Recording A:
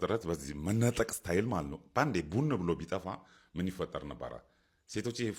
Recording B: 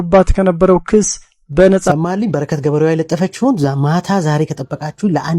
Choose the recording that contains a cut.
B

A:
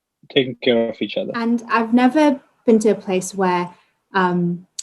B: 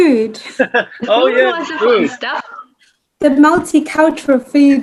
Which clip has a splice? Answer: A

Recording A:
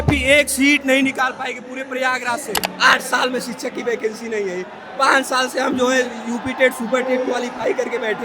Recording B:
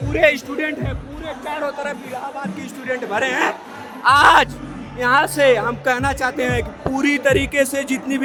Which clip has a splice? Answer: A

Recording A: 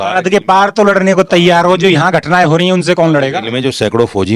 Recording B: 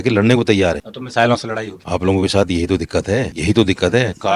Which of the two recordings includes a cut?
B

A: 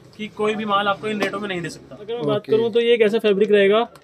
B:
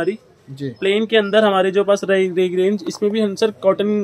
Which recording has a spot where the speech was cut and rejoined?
A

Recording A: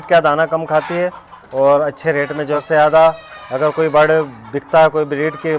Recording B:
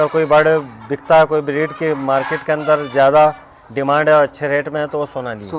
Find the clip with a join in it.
A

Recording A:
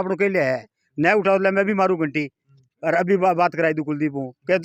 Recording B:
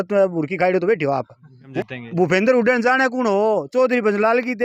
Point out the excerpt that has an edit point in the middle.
B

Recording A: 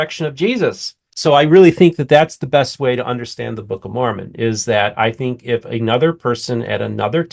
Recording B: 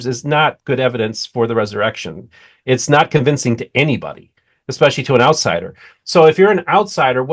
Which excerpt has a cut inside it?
A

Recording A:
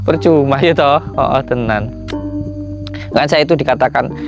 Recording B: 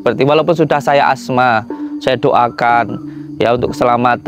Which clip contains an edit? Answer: A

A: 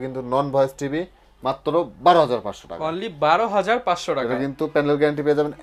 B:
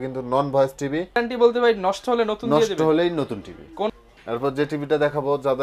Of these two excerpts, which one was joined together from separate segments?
B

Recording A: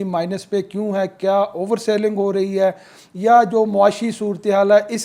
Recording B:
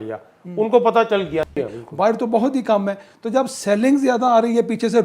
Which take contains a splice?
B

